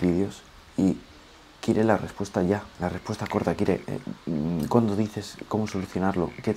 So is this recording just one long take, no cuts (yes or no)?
yes